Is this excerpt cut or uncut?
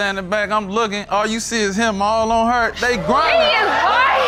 uncut